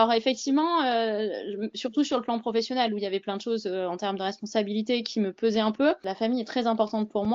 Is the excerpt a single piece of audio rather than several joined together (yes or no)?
no